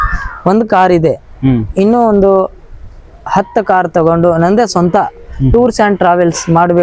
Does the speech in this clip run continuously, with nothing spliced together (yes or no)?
yes